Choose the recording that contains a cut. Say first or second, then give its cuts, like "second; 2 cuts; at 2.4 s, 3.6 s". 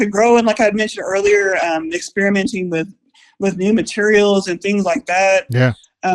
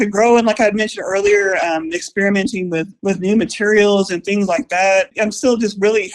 second; 2 cuts; at 2.9 s, 5.1 s